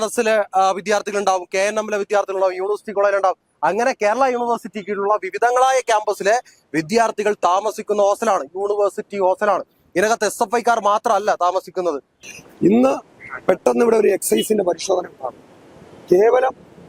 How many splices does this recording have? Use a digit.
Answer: 1